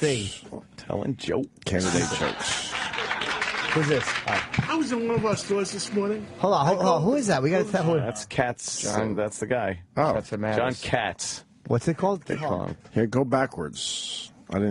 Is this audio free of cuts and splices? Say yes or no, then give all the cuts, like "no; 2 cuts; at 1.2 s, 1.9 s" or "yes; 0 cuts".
no; 1 cut; at 11.0 s